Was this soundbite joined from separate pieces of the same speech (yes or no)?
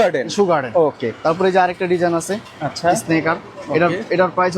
no